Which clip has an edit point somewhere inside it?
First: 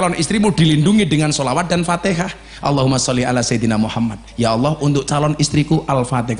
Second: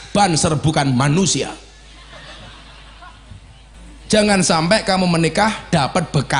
second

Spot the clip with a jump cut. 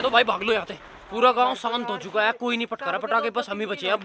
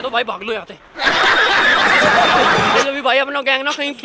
first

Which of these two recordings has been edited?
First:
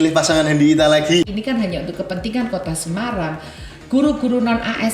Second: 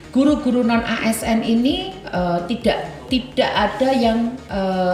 first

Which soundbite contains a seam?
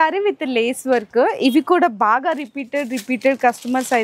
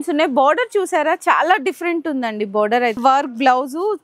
second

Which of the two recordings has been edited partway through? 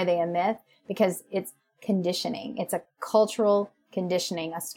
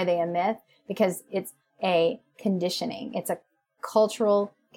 first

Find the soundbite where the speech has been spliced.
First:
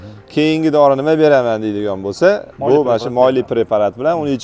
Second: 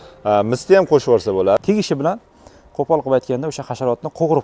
second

